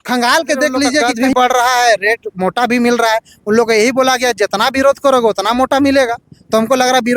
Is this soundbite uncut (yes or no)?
no